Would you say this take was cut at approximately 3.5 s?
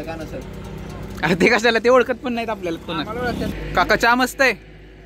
yes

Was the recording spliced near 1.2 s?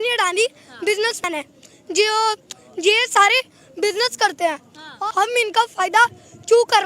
yes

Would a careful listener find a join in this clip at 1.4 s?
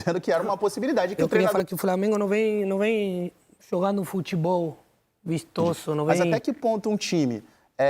yes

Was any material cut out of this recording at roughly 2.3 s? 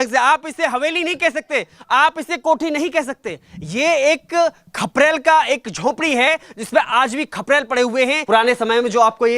no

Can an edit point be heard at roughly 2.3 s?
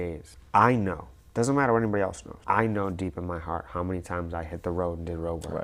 yes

